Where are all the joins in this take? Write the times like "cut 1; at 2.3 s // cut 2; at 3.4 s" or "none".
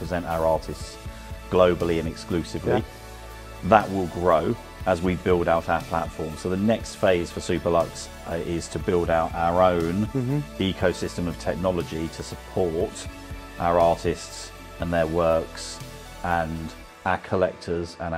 none

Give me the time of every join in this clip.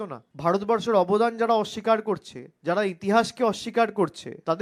none

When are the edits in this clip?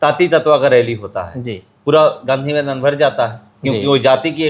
none

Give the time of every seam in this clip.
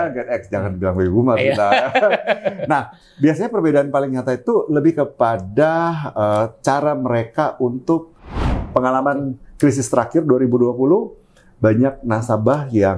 cut 1; at 8.5 s

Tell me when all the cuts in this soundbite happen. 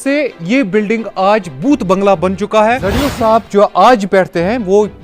cut 1; at 3.0 s

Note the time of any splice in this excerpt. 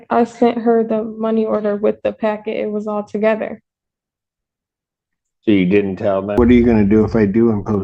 cut 1; at 6.4 s

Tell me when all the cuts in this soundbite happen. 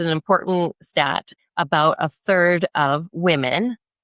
cut 1; at 1.4 s

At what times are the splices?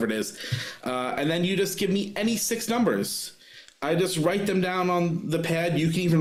none

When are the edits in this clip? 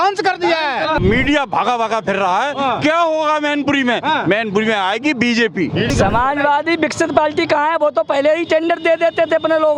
cut 1; at 1.0 s // cut 2; at 5.9 s

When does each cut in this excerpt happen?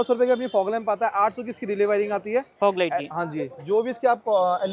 none

